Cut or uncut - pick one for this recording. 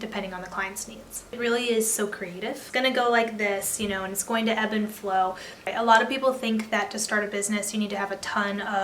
cut